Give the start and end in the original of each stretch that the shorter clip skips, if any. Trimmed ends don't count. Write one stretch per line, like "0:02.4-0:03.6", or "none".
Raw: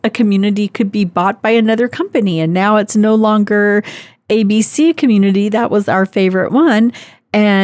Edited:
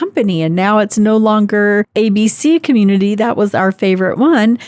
0:03.9-0:04.2